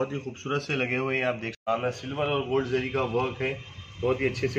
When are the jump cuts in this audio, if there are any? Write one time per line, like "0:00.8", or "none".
0:01.7